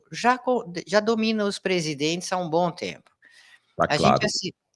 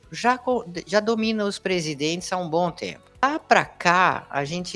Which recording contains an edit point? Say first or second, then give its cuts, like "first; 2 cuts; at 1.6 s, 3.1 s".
second; 1 cut; at 3.2 s